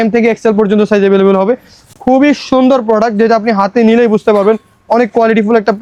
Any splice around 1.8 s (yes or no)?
no